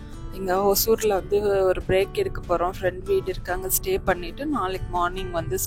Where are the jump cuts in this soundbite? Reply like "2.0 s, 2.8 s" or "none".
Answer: none